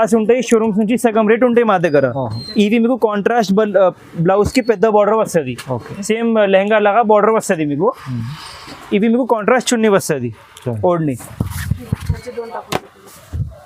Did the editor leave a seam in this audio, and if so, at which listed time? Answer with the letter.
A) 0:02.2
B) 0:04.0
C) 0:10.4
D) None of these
D